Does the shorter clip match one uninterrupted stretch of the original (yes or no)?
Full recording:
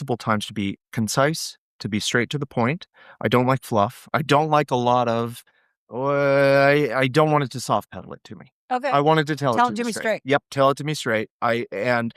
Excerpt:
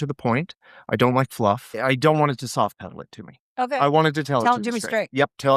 no